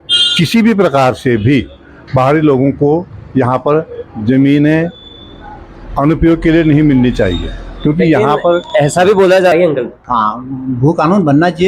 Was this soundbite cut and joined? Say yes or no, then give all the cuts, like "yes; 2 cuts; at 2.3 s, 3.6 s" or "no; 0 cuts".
yes; 1 cut; at 9.5 s